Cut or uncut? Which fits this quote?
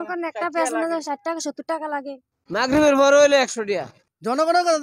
cut